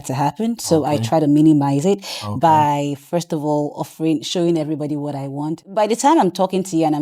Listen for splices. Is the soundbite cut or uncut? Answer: cut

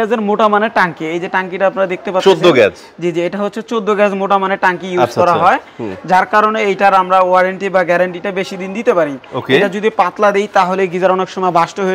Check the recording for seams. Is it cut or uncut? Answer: uncut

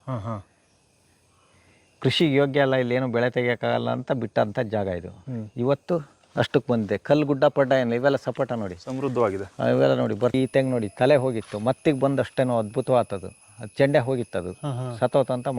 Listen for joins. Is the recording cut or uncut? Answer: cut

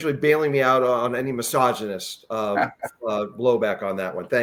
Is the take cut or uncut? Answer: uncut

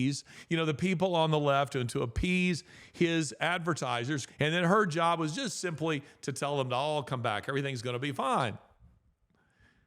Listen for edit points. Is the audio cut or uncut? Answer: cut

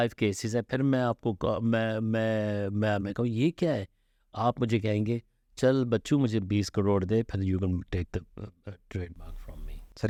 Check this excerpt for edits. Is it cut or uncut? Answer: uncut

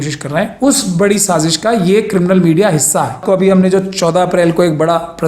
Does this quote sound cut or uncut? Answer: cut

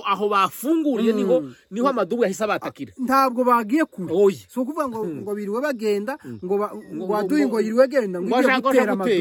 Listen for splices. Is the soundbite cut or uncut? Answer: uncut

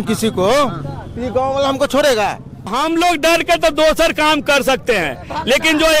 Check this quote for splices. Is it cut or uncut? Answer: cut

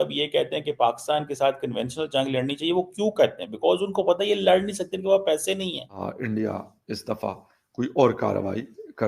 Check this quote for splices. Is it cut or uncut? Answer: cut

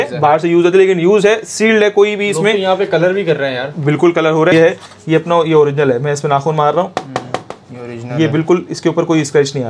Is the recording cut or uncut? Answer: cut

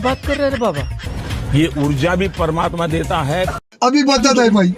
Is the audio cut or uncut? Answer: cut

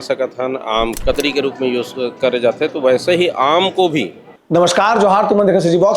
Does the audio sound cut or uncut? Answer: cut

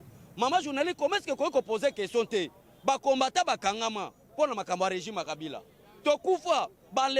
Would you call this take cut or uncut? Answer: uncut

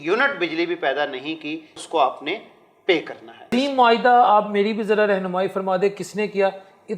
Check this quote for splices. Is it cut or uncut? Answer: cut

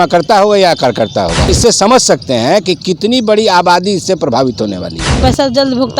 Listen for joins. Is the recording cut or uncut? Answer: cut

